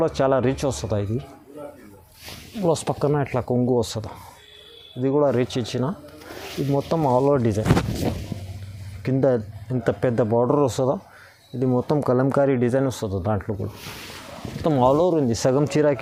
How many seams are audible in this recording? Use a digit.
0